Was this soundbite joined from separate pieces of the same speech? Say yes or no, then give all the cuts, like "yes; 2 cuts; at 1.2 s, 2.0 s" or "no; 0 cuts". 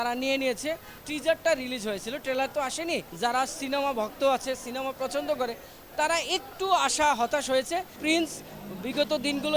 yes; 3 cuts; at 0.9 s, 3.1 s, 7.9 s